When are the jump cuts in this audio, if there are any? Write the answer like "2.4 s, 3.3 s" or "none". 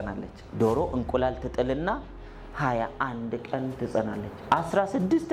none